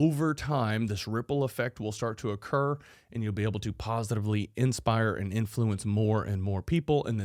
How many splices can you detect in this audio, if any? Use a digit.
0